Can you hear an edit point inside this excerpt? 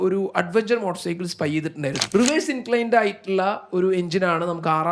yes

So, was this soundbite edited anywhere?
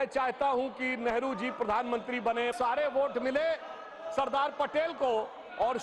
yes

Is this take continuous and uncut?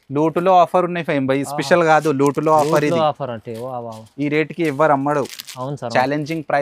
yes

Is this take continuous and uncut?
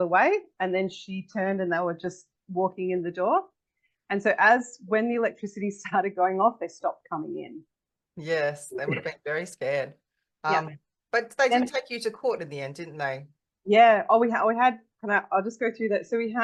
yes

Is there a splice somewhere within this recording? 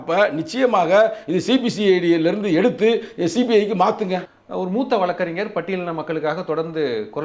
yes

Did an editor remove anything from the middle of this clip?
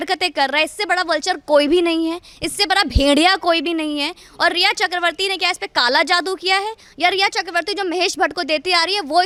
no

